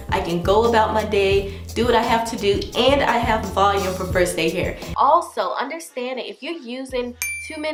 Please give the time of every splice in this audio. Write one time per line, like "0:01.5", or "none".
none